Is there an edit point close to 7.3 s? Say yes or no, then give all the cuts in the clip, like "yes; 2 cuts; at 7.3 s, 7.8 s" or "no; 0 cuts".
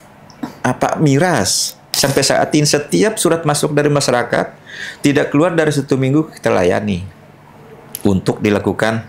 no; 1 cut; at 1.8 s